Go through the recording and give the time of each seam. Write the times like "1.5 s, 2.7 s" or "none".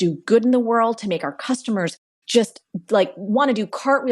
none